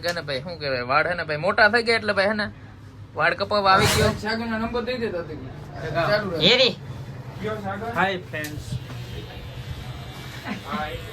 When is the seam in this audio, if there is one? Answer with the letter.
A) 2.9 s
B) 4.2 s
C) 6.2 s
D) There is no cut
B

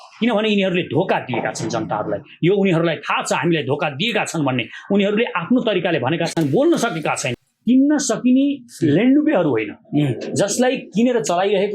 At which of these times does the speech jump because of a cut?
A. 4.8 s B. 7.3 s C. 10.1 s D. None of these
B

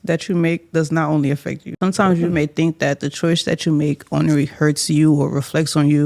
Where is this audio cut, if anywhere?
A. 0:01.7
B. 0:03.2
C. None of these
A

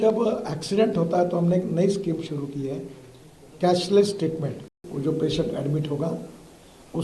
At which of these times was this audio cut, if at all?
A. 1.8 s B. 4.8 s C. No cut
B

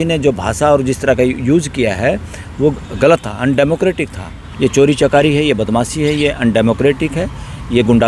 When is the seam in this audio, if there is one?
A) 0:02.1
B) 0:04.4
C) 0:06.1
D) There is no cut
B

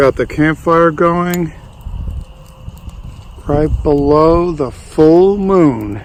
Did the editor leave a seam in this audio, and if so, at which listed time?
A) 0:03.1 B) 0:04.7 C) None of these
C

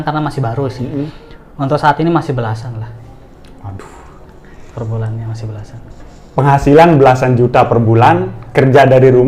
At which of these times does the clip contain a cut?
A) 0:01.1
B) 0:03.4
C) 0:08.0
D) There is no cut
A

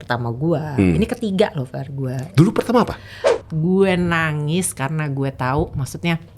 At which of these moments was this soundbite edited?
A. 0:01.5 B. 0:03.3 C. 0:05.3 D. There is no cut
B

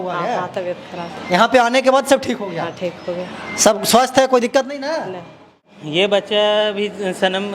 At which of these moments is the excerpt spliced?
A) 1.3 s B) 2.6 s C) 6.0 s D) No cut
C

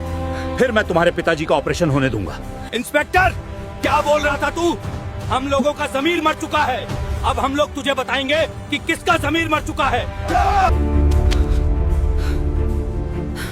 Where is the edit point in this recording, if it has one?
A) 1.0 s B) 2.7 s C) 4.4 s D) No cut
B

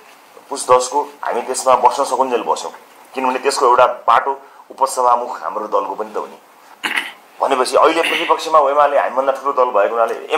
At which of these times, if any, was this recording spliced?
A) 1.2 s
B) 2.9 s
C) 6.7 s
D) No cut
C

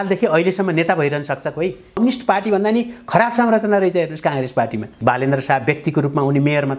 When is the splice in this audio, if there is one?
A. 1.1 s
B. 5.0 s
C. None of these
B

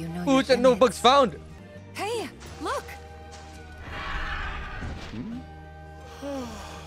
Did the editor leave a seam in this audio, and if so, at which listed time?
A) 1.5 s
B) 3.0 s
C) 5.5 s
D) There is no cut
A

